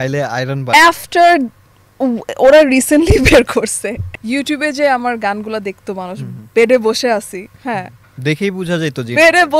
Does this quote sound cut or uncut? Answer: cut